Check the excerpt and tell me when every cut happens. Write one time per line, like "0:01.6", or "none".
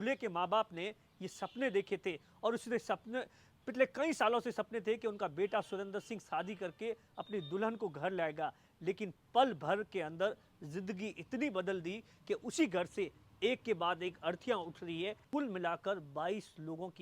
0:15.2